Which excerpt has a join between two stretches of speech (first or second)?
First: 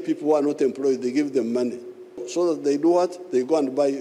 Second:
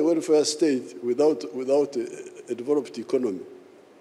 first